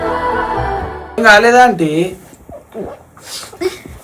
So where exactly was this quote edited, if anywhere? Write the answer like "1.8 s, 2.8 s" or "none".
1.2 s